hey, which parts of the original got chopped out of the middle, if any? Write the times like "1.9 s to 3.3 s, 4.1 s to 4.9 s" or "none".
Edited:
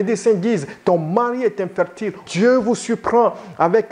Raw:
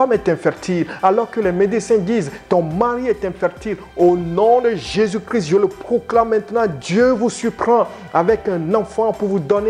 3.9 s to 6.8 s